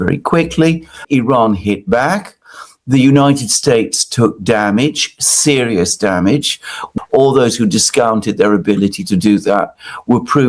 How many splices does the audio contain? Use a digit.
2